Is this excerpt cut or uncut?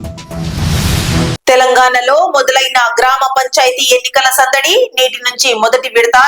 cut